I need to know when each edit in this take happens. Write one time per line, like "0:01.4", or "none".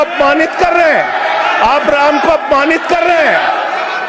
none